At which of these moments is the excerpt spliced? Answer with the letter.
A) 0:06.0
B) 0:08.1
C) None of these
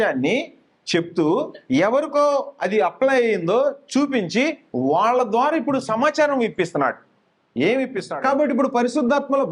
B